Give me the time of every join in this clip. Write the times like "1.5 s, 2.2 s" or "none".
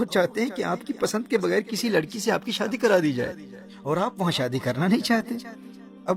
none